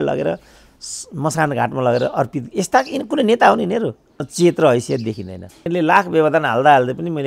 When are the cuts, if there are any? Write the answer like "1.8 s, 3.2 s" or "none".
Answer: 4.3 s, 5.7 s